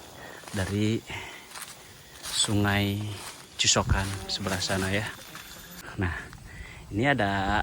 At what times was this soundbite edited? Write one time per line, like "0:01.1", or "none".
0:05.8